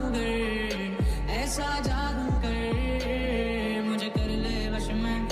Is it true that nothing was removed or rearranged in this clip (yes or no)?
yes